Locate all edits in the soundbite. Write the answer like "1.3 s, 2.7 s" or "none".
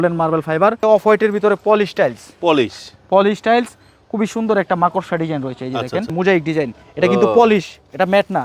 0.8 s, 6.1 s

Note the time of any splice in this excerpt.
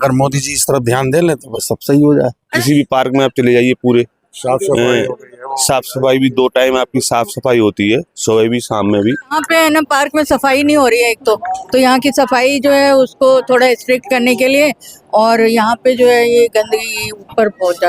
2.5 s, 9.4 s

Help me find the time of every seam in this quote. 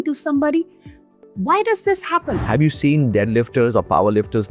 2.4 s

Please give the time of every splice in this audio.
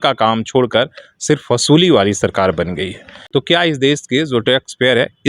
3.1 s

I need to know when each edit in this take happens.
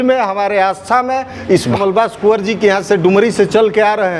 1.8 s

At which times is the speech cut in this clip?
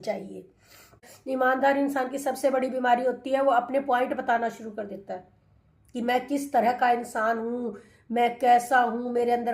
1.1 s

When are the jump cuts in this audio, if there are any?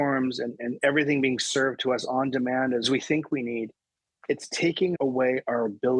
2.9 s, 4.9 s

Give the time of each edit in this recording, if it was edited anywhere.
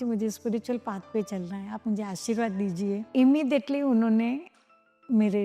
3.1 s

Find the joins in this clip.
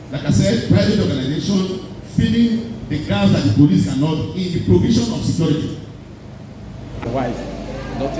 7.0 s

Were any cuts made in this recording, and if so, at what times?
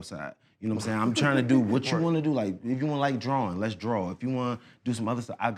none

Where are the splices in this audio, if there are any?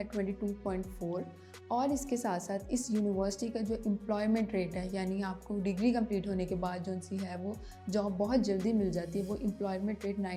none

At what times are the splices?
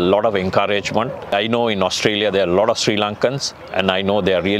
1.3 s

